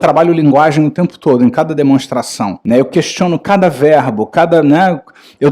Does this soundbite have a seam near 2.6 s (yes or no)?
yes